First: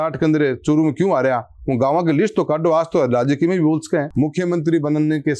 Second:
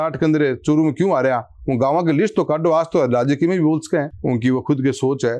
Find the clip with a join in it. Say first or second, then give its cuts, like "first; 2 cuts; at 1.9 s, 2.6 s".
first; 1 cut; at 4.1 s